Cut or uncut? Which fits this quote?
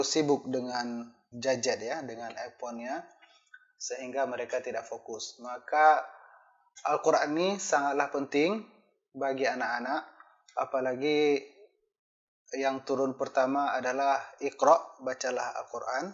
uncut